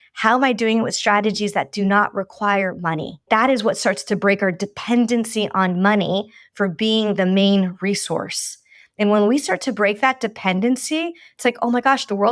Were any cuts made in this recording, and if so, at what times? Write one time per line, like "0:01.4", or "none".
0:03.2